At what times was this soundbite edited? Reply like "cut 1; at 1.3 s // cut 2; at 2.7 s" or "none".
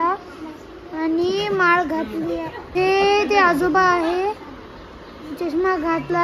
cut 1; at 2.7 s